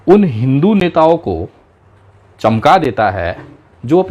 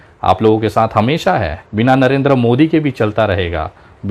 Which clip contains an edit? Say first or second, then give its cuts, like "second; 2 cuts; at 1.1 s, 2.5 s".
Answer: second; 1 cut; at 1.6 s